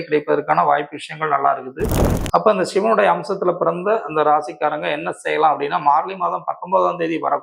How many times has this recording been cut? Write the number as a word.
one